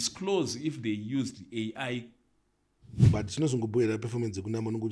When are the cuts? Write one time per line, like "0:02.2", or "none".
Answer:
0:03.1